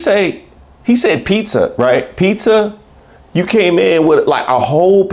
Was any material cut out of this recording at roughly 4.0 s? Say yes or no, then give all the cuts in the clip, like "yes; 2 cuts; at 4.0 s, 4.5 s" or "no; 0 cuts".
no; 0 cuts